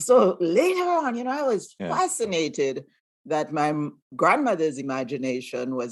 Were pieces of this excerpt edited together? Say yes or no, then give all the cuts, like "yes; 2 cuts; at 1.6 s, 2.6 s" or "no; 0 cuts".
no; 0 cuts